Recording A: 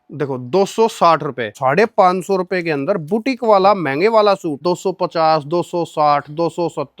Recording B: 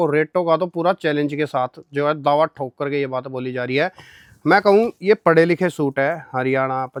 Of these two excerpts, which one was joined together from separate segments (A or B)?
A